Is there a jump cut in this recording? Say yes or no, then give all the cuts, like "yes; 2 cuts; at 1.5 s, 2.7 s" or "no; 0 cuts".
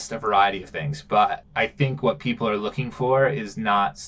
yes; 1 cut; at 1.4 s